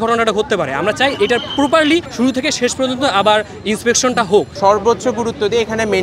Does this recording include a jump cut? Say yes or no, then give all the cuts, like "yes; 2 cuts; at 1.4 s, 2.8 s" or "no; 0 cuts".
yes; 2 cuts; at 2.1 s, 4.5 s